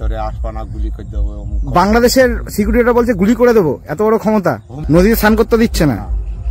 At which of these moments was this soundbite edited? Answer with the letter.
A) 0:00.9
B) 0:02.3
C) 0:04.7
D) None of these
C